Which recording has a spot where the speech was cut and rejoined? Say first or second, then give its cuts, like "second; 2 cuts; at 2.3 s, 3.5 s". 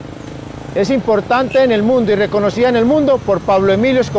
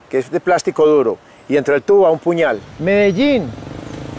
second; 1 cut; at 2.7 s